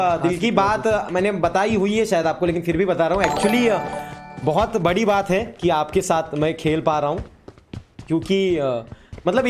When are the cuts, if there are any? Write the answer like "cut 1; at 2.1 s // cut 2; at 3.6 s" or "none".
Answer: none

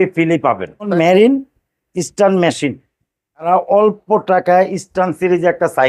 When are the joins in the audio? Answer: cut 1; at 0.9 s // cut 2; at 3.5 s

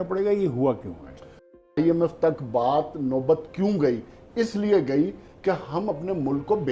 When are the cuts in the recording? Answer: cut 1; at 1.5 s

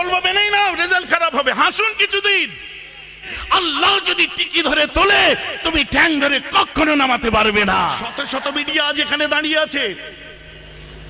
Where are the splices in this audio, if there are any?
cut 1; at 3.2 s // cut 2; at 8.1 s

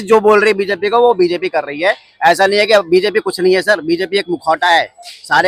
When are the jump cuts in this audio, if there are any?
none

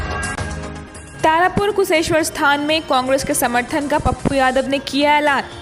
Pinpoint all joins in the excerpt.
cut 1; at 0.9 s

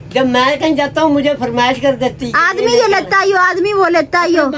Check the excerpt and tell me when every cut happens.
none

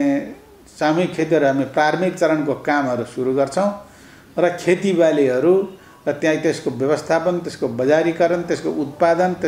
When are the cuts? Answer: none

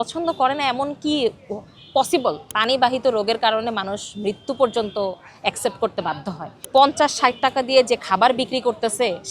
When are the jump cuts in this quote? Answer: cut 1; at 2.5 s // cut 2; at 6.5 s

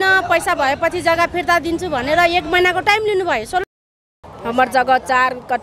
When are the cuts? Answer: cut 1; at 4.0 s

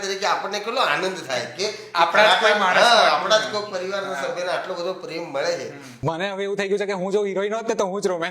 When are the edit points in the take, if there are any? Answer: cut 1; at 6.0 s

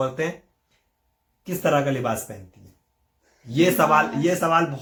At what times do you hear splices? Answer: none

